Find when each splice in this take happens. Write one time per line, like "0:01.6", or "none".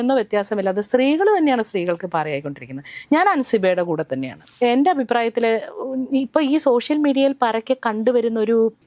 0:04.4